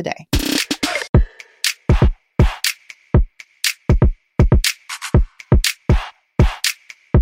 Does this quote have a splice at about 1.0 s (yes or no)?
yes